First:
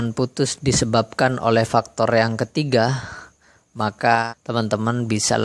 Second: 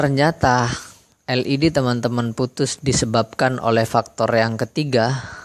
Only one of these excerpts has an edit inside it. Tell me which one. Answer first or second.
first